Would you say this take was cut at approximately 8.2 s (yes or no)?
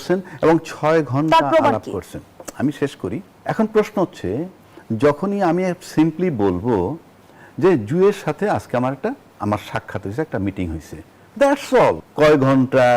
no